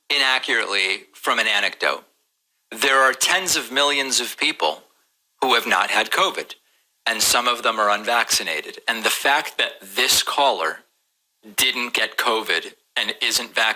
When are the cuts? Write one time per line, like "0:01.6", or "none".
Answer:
0:07.5
0:09.0